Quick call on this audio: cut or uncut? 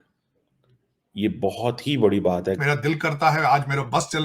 cut